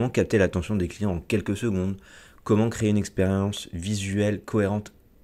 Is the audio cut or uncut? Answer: uncut